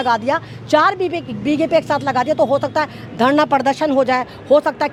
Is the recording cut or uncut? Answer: uncut